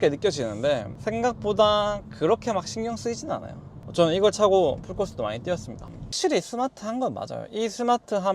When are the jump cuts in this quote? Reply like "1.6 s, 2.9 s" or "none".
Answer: 6.1 s